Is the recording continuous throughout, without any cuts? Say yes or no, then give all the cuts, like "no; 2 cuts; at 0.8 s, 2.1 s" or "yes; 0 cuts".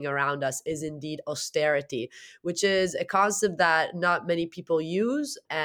yes; 0 cuts